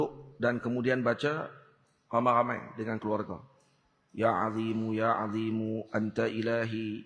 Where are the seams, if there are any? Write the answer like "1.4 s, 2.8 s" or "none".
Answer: none